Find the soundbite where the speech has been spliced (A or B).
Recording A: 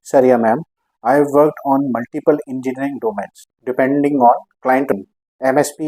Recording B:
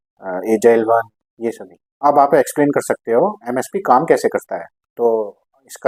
A